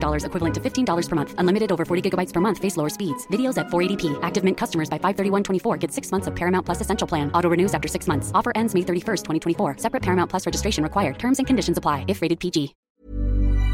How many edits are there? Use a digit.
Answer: 1